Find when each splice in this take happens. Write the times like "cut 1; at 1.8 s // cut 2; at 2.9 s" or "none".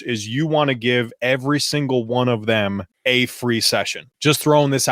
cut 1; at 2.9 s // cut 2; at 4.0 s